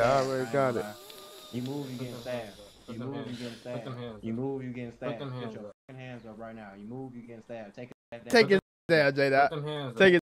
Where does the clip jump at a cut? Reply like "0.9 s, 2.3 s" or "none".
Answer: none